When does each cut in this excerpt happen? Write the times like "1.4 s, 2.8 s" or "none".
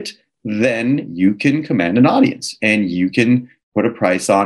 3.6 s

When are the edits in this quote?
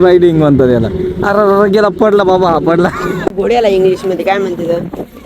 3.2 s

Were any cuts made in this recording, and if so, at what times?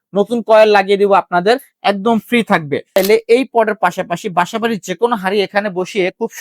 3.0 s

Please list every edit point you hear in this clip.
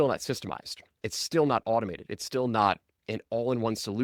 none

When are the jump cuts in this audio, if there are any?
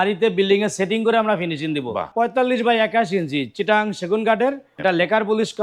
2.1 s, 4.7 s

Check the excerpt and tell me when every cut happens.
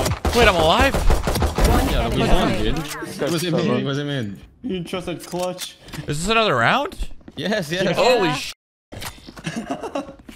none

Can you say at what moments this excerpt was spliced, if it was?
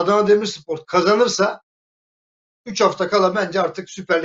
none

